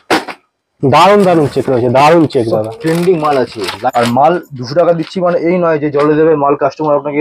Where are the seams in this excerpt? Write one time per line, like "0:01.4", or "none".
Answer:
0:03.7